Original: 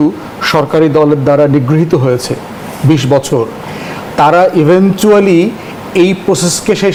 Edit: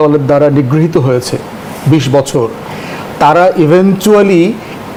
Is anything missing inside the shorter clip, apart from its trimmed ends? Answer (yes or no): no